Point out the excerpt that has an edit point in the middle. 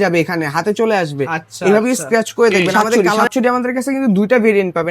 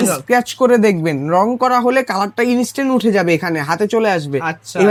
first; 1 cut; at 2.8 s

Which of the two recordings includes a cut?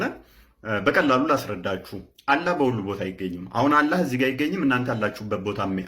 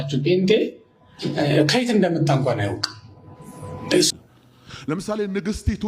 second; 1 cut; at 4.1 s

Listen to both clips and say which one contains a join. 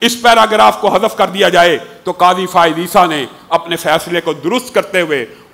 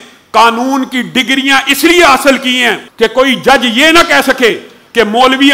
second; 1 cut; at 2.8 s

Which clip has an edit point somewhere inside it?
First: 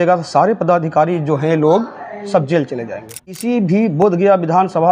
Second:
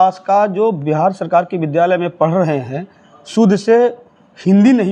first; 1 cut; at 3.4 s

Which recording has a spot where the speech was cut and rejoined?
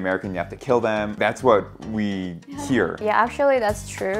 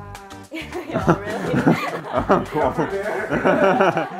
first; 2 cuts; at 1.1 s, 3.0 s

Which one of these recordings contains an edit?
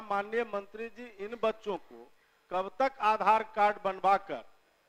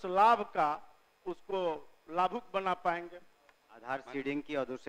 second; 1 cut; at 3.7 s

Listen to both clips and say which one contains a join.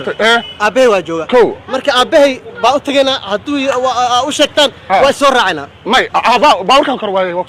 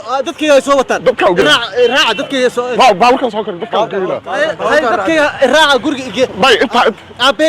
second; 1 cut; at 1.4 s

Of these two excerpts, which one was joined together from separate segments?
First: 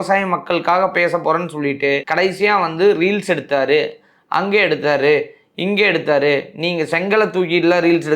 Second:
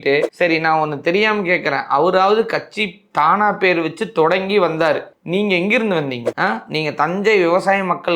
second; 1 cut; at 6.3 s

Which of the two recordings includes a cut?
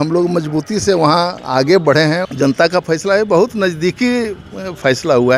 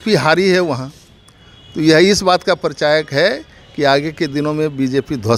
first; 1 cut; at 2.2 s

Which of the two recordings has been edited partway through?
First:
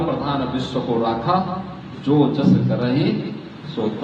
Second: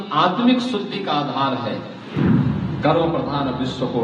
second; 1 cut; at 2.1 s

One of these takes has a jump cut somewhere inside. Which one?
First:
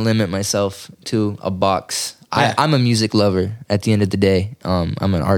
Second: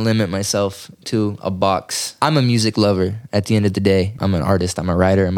second; 2 cuts; at 2.2 s, 4.2 s

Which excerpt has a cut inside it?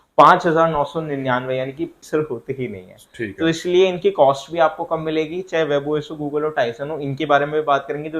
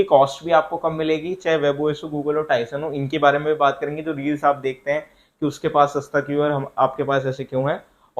first; 1 cut; at 2.0 s

